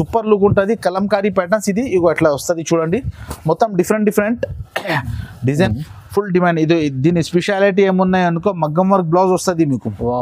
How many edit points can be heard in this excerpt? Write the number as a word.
one